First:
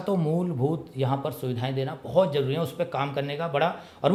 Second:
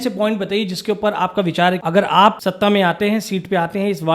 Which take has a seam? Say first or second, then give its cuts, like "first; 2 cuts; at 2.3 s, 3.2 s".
second; 2 cuts; at 1.8 s, 2.4 s